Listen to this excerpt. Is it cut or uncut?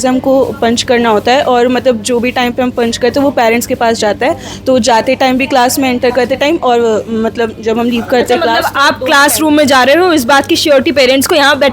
uncut